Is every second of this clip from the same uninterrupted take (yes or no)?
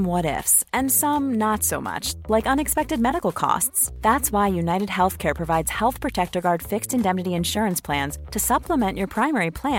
yes